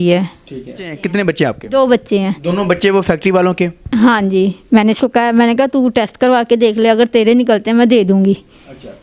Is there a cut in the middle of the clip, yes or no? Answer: yes